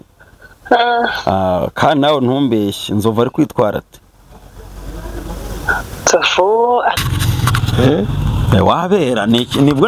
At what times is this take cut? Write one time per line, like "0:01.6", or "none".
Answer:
0:07.0